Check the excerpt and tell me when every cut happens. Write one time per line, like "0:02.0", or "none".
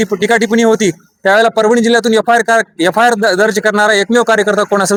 none